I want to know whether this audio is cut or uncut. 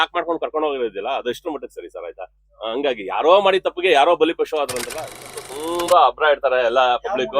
cut